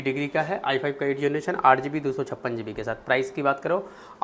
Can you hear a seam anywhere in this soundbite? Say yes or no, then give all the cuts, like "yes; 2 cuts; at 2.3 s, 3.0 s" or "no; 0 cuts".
no; 0 cuts